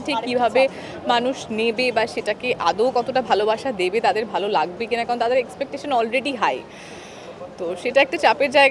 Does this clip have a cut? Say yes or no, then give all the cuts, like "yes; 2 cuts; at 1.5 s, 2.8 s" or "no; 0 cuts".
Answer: no; 0 cuts